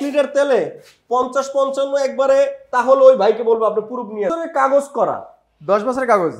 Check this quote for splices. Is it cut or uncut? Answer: cut